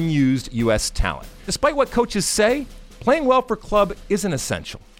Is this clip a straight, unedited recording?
no; 1 cut; at 1.5 s

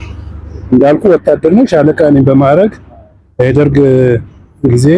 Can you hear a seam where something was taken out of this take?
no; 0 cuts

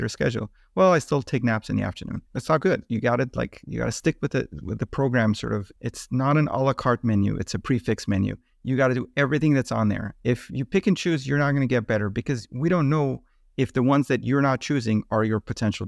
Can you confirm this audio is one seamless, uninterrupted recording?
no; 3 cuts; at 2.2 s, 5.7 s, 10.1 s

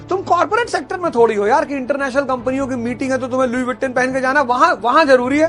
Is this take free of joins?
yes; 0 cuts

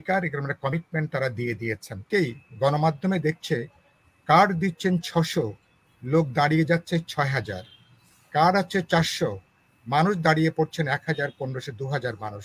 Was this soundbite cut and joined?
yes; 1 cut; at 2.0 s

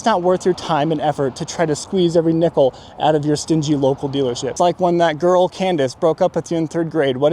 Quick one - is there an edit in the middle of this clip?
yes; 1 cut; at 4.5 s

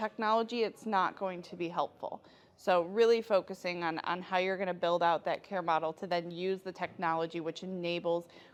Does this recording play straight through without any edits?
yes; 0 cuts

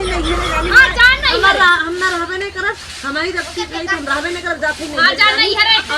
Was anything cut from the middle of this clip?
yes; 1 cut; at 1.1 s

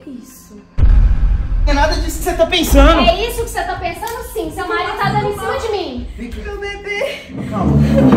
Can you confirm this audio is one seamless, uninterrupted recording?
no; 1 cut; at 1.7 s

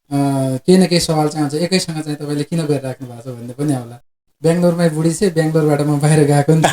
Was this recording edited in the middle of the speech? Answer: yes; 1 cut; at 4.2 s

